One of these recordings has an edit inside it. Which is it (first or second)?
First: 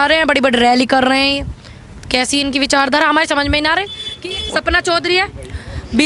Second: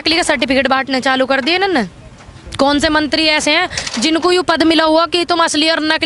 first